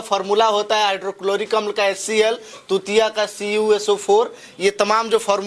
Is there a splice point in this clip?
no; 0 cuts

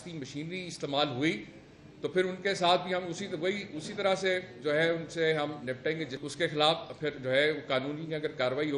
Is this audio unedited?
no; 1 cut; at 6.2 s

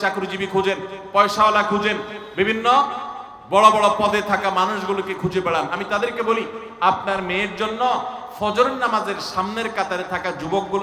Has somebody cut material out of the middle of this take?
no; 0 cuts

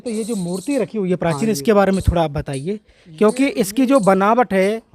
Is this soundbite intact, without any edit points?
yes; 0 cuts

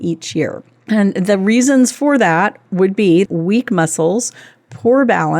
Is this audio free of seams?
no; 1 cut; at 3.3 s

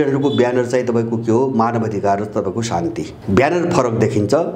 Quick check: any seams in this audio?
yes; 1 cut; at 3.2 s

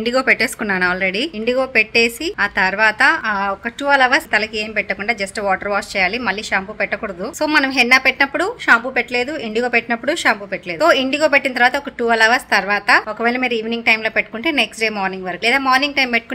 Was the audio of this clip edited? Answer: no; 0 cuts

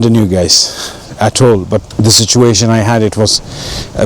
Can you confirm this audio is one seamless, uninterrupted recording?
no; 1 cut; at 1.9 s

